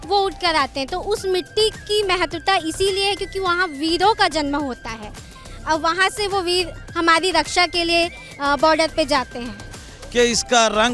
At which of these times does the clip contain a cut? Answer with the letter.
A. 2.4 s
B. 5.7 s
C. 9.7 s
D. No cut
C